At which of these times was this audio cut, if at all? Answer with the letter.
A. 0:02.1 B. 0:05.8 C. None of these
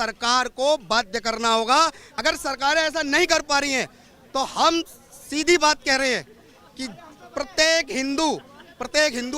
A